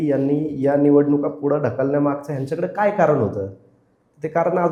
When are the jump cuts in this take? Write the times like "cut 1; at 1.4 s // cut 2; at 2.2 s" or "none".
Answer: none